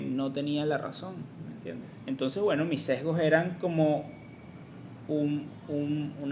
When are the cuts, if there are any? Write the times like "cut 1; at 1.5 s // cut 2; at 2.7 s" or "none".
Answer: cut 1; at 1.9 s